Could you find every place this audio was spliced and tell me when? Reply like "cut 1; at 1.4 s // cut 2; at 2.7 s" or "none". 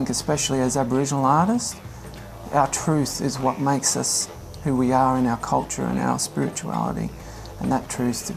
none